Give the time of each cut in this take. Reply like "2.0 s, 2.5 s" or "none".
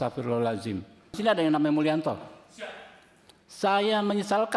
1.1 s